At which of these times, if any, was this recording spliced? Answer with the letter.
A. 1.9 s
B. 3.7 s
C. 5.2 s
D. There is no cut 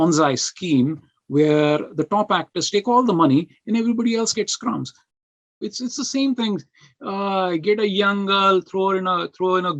C